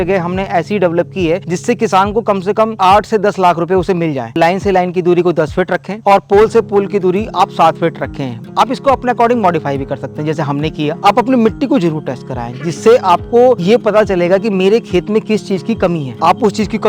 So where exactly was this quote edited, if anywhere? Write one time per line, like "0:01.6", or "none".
0:02.8
0:04.3
0:11.0